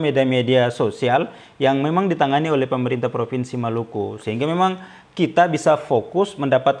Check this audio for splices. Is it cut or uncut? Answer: uncut